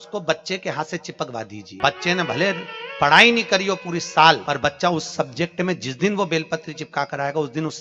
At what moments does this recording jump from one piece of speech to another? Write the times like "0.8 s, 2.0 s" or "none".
1.7 s, 4.4 s